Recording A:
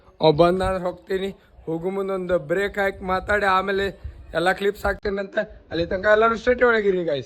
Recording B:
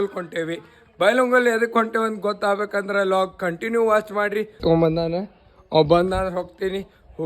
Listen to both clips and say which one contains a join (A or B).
B